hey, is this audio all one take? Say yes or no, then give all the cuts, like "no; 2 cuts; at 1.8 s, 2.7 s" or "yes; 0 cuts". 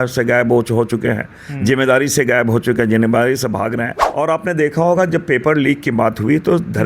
no; 1 cut; at 4.0 s